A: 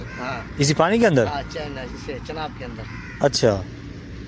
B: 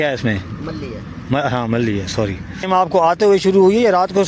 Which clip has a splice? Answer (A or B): B